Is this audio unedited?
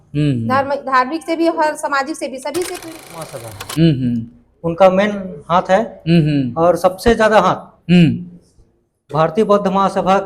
no; 1 cut; at 3.3 s

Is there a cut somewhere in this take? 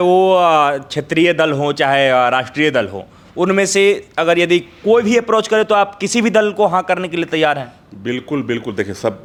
no; 0 cuts

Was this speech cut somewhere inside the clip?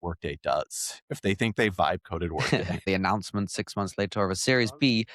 yes; 1 cut; at 2.9 s

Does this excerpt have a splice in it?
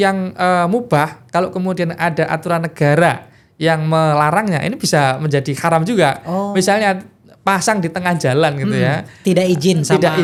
no; 0 cuts

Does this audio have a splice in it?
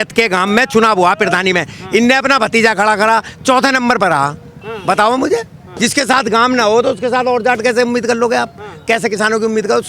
no; 0 cuts

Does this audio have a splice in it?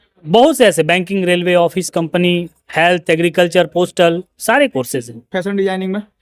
no; 0 cuts

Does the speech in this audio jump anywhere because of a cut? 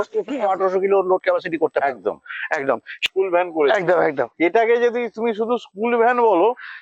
yes; 1 cut; at 3.0 s

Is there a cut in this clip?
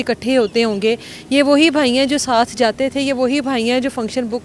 no; 0 cuts

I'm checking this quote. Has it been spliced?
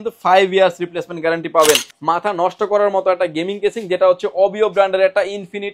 yes; 1 cut; at 1.9 s

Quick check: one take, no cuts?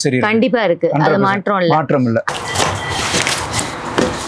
yes; 0 cuts

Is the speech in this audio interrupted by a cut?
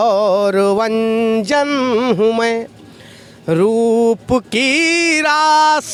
no; 0 cuts

